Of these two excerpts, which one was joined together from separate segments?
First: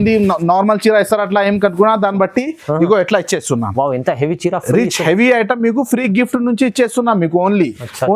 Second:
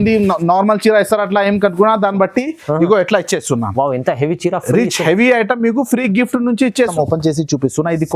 second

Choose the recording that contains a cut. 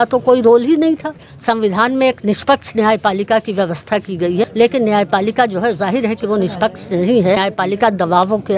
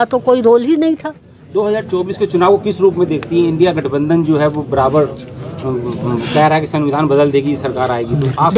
first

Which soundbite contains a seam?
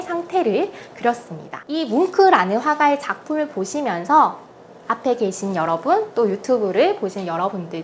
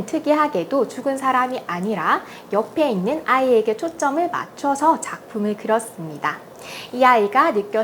first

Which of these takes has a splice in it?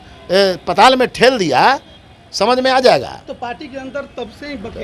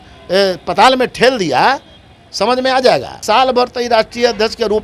second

